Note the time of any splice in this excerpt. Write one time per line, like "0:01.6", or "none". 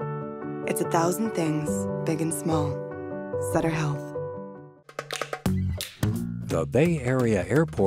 0:04.7